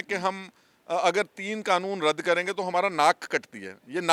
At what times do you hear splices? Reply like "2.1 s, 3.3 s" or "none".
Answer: none